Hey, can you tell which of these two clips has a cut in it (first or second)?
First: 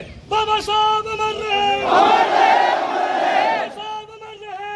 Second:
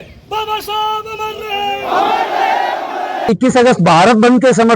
second